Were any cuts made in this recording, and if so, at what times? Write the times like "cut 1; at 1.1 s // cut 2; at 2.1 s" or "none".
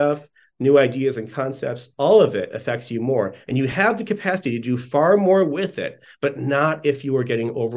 none